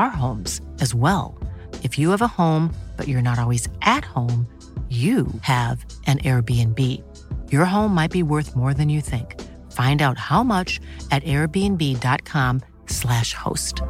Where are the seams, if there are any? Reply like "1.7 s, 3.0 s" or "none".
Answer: none